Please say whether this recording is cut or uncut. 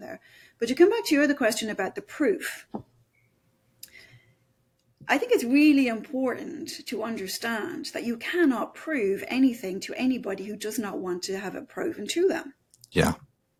uncut